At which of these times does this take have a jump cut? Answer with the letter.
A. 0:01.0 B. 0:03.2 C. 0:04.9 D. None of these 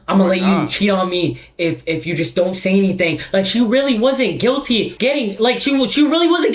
C